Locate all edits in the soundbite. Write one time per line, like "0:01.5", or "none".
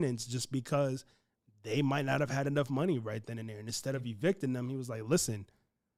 none